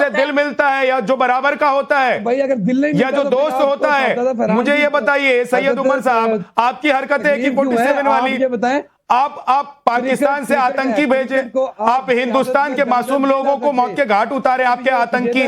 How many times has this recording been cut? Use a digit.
1